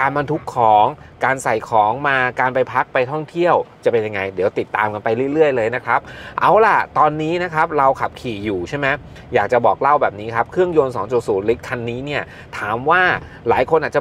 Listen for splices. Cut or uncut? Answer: uncut